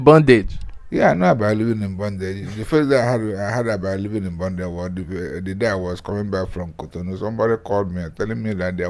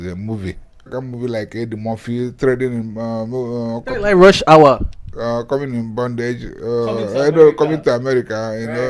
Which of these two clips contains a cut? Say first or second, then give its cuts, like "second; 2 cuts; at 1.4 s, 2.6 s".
second; 1 cut; at 0.9 s